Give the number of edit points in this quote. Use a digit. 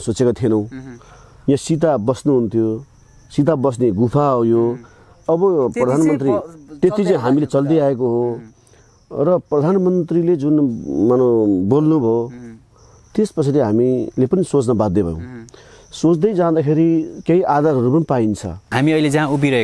1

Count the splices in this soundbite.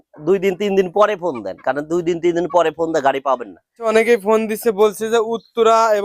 1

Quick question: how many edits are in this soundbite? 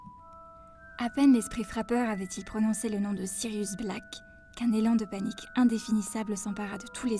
1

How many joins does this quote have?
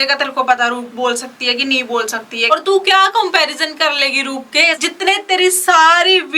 2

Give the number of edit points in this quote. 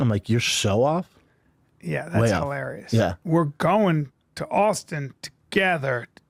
0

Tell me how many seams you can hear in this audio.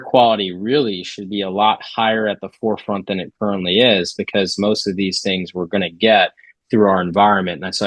0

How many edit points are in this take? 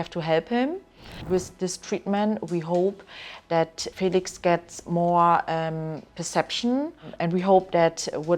3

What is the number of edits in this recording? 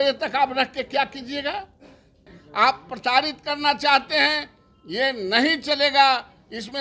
1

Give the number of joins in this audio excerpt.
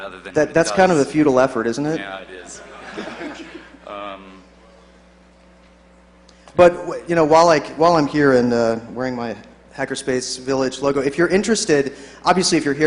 1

